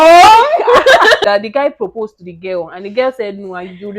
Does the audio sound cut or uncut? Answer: cut